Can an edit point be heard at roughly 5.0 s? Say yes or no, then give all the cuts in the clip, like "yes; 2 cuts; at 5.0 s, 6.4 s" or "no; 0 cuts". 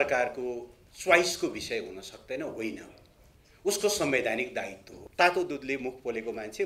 yes; 1 cut; at 5.0 s